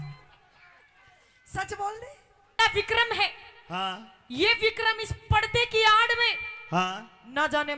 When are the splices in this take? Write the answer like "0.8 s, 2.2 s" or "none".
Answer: 2.5 s